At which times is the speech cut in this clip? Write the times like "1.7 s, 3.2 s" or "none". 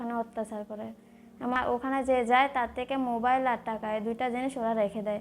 1.6 s

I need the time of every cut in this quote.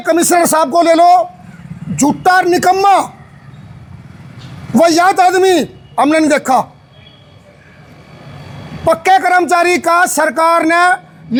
none

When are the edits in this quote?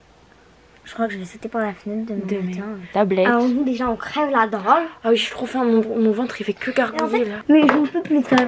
2.9 s, 7.4 s

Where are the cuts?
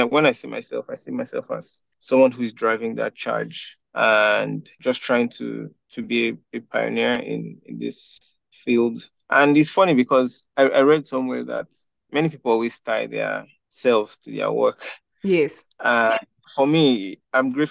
none

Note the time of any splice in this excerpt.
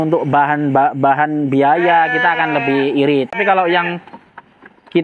3.3 s

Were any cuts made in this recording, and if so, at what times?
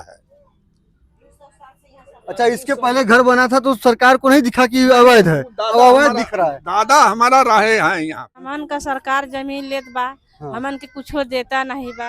8.4 s

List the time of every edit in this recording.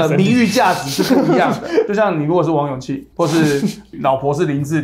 1.9 s

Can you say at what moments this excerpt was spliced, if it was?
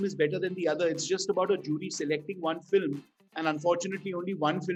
none

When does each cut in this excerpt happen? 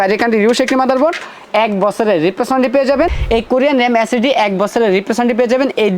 3.1 s

